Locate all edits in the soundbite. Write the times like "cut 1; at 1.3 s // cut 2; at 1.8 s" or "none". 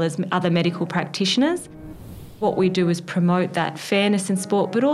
cut 1; at 2.2 s